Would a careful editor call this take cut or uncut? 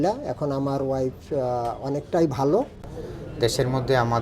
cut